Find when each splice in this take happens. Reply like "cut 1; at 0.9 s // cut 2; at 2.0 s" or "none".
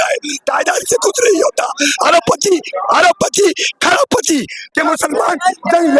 cut 1; at 4.7 s

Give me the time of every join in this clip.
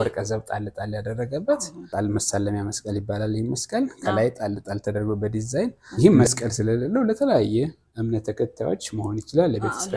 cut 1; at 1.9 s // cut 2; at 5.8 s

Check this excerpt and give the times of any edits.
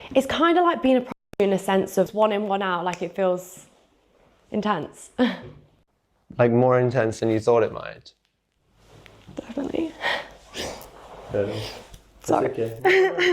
cut 1; at 2.1 s

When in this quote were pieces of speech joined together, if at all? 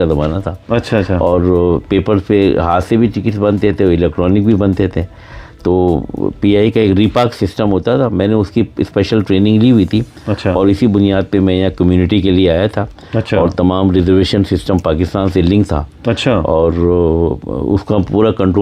none

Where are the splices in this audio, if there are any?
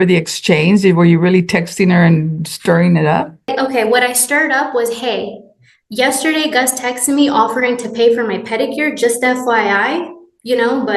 cut 1; at 3.5 s

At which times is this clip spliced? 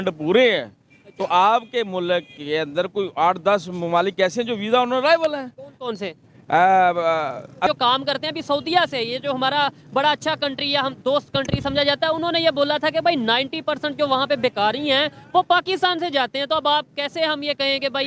cut 1; at 7.7 s

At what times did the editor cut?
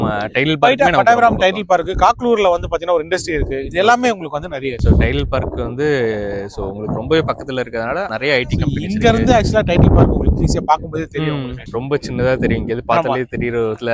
none

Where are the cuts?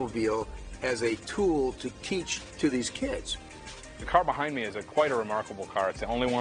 cut 1; at 2.5 s // cut 2; at 3.4 s

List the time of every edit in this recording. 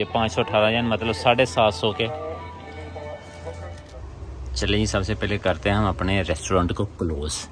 cut 1; at 3.8 s

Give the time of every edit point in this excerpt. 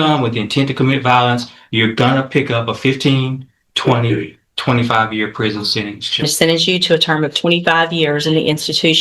cut 1; at 6.2 s

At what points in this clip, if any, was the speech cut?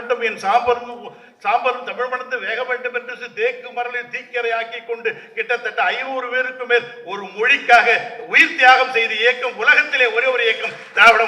none

